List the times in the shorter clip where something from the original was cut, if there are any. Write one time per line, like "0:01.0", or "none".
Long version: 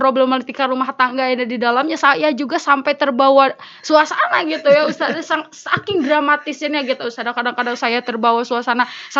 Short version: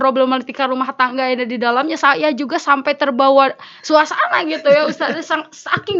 none

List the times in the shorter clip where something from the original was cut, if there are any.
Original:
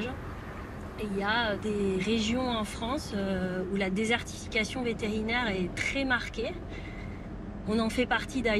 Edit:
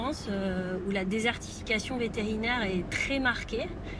none

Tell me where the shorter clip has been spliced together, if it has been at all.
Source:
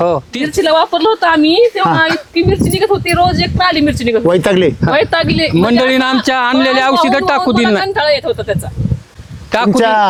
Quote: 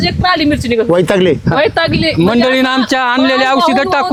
none

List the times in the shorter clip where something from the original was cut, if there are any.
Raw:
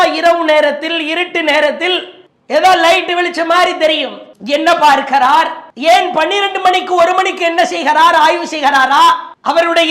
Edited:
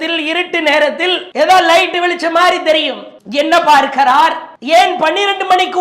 0:01.2

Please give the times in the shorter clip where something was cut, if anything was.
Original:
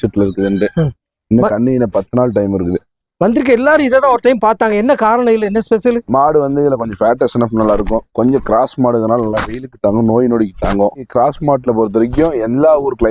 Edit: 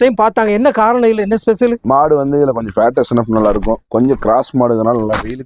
none

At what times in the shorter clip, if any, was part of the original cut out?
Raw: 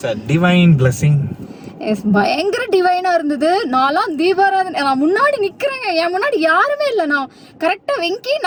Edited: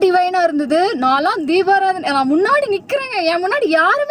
none

